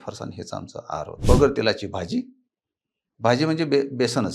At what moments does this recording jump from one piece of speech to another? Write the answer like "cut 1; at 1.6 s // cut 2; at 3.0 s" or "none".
cut 1; at 1.2 s